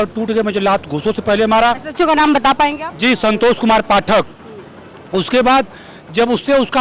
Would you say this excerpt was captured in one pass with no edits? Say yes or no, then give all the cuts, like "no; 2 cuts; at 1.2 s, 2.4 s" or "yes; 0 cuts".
yes; 0 cuts